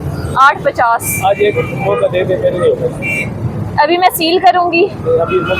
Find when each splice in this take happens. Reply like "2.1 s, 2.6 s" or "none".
none